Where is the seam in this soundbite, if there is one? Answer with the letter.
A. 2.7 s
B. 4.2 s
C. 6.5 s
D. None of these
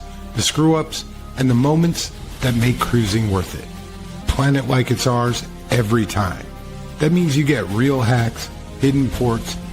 B